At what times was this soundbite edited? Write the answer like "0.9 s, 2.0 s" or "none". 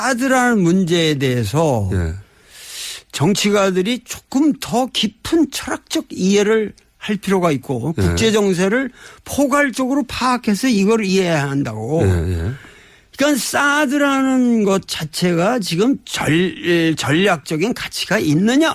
15.1 s